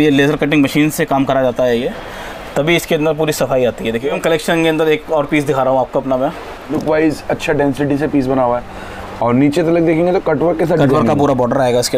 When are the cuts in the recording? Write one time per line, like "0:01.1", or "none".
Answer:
0:04.2
0:06.7